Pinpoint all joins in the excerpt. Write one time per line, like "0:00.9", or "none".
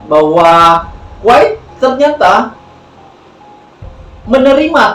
none